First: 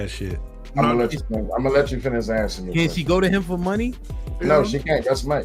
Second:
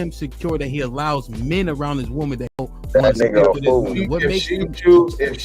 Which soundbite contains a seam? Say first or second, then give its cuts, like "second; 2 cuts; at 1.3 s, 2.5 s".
second; 1 cut; at 2.6 s